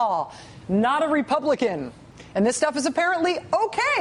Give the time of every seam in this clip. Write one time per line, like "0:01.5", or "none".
0:02.2